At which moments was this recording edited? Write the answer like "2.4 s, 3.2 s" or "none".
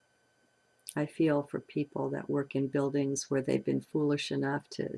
1.7 s